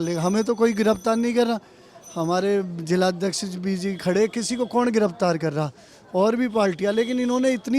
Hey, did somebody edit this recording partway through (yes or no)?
no